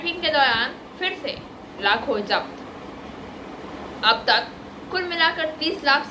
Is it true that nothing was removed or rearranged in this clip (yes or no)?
yes